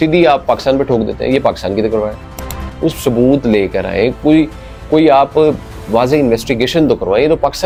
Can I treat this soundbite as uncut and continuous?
yes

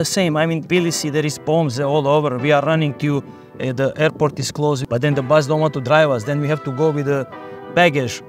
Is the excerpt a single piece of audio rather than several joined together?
no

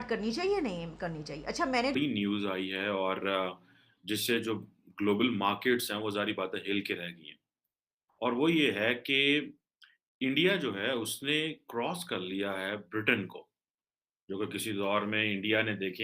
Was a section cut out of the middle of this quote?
yes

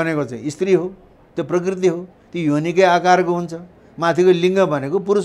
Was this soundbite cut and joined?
no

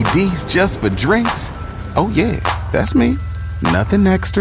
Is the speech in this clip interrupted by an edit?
no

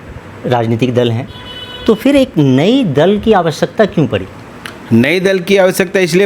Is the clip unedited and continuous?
yes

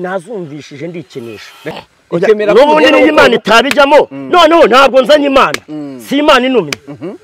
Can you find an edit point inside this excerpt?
yes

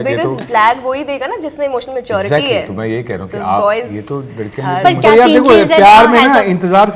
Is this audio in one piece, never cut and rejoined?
yes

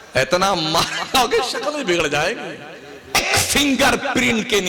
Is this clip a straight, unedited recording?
no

